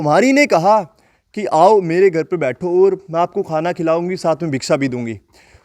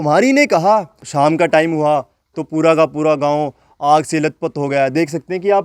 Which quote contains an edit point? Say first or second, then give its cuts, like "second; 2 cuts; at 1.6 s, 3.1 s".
second; 1 cut; at 1.0 s